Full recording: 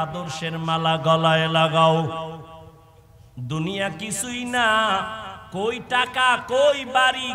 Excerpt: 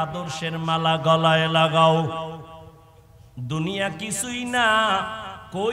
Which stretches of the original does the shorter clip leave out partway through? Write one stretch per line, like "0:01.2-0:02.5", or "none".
none

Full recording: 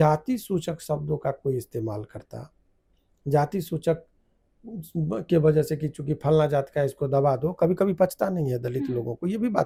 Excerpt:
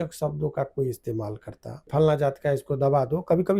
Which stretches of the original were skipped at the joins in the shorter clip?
0:02.6-0:06.2

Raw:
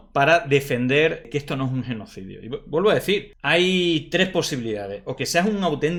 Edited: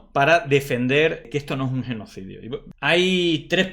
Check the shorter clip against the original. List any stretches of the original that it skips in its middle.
0:02.7-0:03.3

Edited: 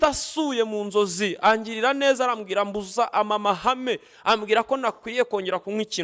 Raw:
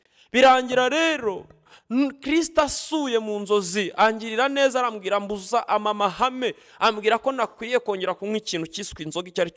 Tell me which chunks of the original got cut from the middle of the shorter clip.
none

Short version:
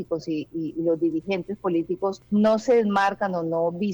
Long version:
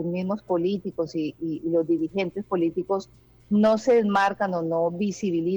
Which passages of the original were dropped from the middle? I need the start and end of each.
0:03.1-0:03.4

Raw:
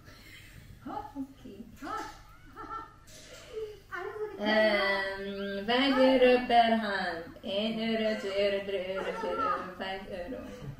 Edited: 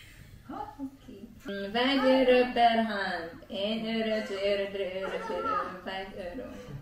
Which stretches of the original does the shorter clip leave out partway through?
0:01.8-0:05.4

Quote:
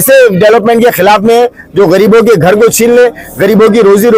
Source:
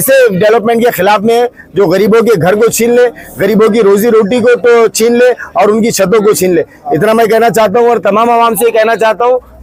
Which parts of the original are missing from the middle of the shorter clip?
none

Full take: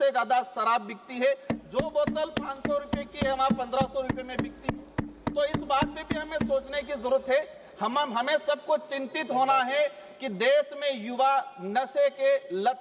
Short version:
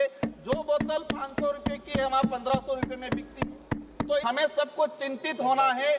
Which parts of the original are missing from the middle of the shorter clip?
0:05.5-0:08.1

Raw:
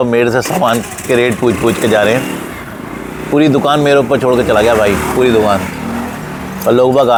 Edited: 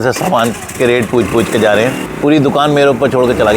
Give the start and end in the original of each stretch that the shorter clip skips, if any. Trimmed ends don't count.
0:02.4-0:03.2

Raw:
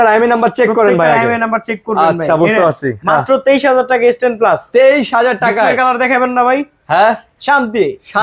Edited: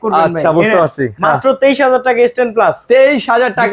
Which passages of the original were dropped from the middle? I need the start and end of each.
none

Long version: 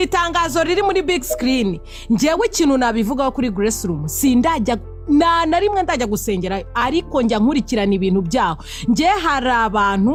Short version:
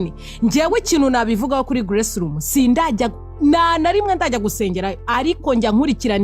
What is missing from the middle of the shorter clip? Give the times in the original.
none

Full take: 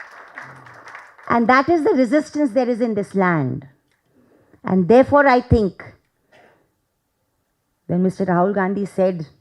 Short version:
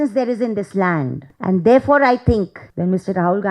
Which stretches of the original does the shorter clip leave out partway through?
0:03.6-0:04.5
0:05.9-0:07.7

